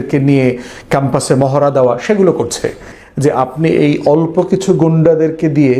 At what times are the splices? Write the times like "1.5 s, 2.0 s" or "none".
2.9 s